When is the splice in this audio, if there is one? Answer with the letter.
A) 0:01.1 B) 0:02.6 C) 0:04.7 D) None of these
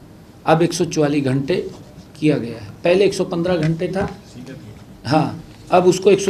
D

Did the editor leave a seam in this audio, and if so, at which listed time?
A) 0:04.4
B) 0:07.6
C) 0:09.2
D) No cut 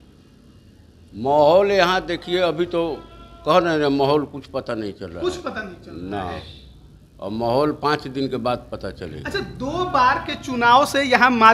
D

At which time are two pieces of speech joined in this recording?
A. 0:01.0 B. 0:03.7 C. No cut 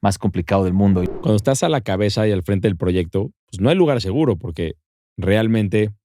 A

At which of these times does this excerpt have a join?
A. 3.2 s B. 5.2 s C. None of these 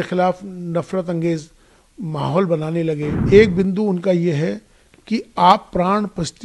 A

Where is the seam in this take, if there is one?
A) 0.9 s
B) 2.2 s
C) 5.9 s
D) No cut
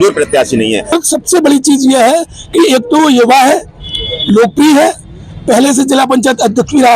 A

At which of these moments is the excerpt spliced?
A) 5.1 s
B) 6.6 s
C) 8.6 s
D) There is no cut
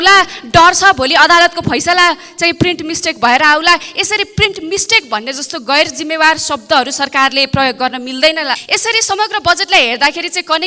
C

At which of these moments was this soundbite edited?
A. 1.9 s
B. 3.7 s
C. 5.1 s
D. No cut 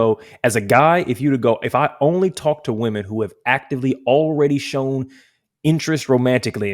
D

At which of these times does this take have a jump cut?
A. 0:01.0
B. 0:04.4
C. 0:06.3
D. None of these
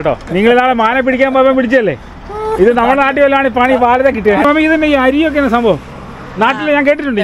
B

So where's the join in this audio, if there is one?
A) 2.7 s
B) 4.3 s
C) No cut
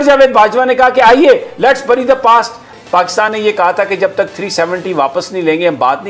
A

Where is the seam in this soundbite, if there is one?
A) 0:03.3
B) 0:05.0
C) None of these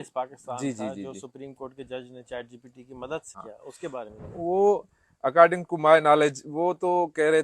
A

